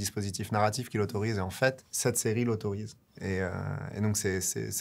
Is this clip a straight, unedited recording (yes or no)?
no